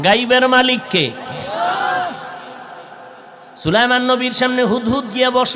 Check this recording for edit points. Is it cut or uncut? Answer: uncut